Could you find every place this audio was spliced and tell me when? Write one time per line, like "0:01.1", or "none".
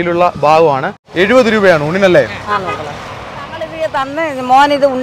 0:01.0
0:03.7